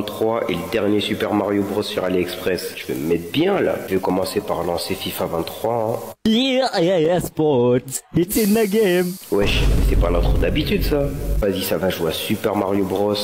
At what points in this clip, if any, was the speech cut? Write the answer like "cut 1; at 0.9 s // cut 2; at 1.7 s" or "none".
cut 1; at 3.9 s // cut 2; at 11.4 s